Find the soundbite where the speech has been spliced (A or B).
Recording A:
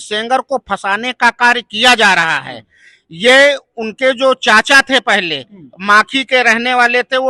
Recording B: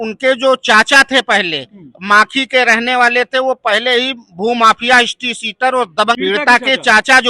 B